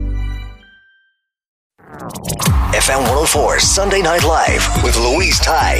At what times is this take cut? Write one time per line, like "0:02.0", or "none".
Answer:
0:01.7